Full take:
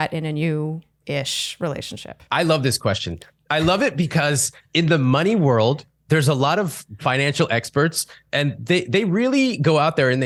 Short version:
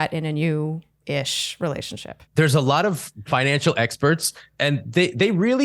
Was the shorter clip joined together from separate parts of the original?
yes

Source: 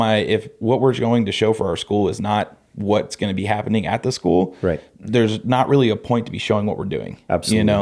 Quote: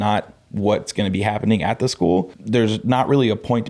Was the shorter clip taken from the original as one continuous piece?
no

